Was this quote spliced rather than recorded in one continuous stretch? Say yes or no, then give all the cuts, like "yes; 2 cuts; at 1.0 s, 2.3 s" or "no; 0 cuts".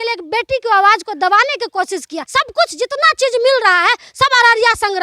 yes; 1 cut; at 2.2 s